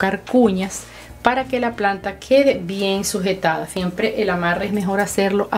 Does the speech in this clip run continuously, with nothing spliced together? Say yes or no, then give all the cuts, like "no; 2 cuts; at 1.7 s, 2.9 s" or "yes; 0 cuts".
no; 1 cut; at 3.7 s